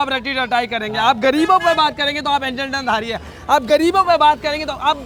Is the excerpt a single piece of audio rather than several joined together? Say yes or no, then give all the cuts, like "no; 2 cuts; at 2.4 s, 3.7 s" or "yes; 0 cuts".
yes; 0 cuts